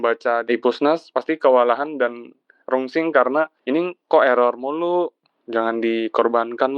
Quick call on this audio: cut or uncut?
cut